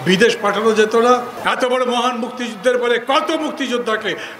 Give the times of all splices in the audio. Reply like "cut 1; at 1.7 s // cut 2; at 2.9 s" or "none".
cut 1; at 1.3 s